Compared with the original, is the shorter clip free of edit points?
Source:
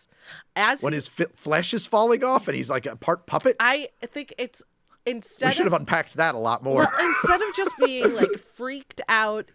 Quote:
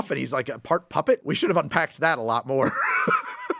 no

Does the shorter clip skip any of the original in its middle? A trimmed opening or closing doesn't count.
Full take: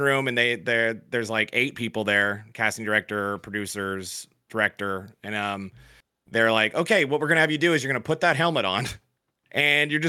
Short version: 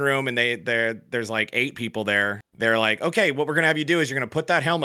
yes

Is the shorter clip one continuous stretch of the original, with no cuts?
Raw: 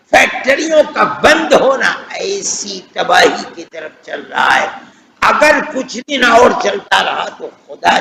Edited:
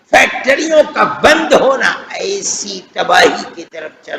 yes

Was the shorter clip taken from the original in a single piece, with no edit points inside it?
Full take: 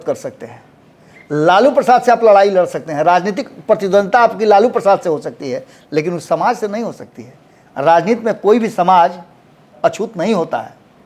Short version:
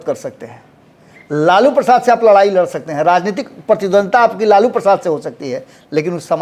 yes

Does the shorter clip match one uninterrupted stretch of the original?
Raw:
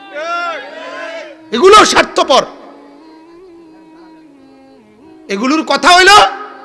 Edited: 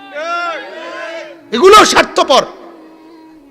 no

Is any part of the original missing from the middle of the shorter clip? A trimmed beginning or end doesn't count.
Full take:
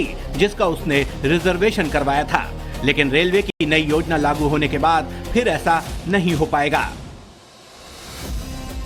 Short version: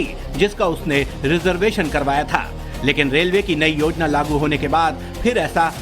yes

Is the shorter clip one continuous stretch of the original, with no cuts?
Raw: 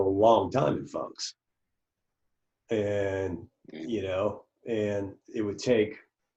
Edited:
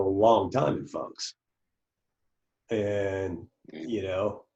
yes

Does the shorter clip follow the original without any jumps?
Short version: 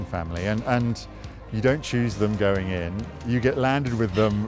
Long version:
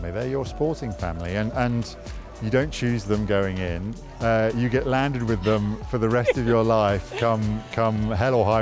no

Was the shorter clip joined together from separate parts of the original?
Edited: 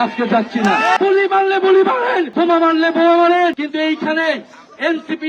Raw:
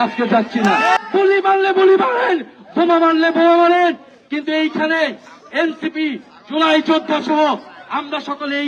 yes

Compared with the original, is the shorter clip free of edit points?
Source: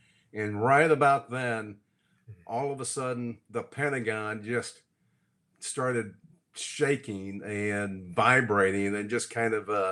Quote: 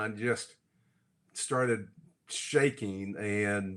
yes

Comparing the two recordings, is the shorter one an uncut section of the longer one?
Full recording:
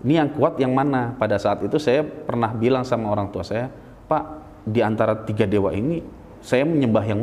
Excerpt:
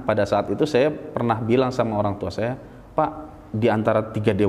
yes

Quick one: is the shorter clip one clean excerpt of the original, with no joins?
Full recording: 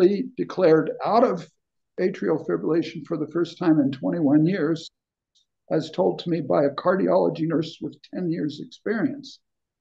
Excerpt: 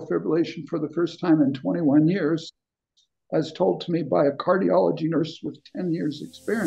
yes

